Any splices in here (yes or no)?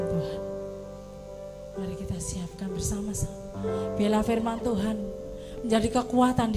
no